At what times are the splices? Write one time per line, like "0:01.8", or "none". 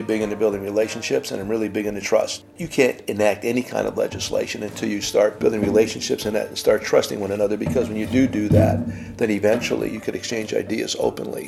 0:05.4